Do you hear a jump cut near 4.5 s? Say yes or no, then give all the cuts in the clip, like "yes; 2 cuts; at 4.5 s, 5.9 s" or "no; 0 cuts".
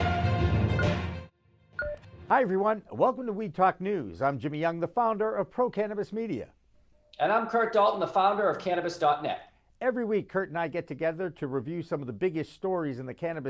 no; 1 cut; at 2.1 s